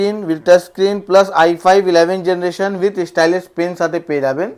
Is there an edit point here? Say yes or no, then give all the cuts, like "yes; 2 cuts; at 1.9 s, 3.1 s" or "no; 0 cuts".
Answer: no; 0 cuts